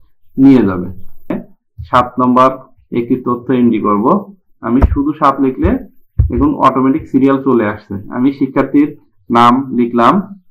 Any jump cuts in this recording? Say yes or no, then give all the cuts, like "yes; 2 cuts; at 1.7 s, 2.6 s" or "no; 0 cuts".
yes; 1 cut; at 1.3 s